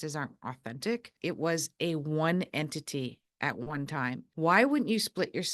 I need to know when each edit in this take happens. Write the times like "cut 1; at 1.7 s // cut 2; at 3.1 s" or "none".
cut 1; at 1.2 s // cut 2; at 4.3 s